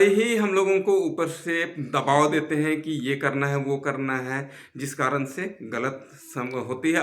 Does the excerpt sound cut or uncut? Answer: uncut